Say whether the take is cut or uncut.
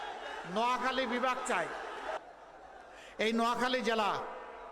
cut